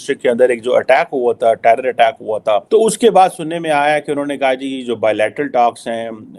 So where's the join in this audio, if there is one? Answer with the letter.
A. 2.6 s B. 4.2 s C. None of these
A